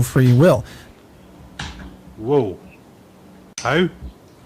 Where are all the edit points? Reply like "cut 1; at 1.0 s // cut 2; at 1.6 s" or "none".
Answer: cut 1; at 0.9 s